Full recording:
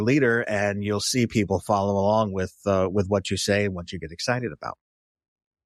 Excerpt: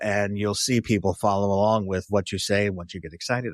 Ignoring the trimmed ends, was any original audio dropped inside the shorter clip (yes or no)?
yes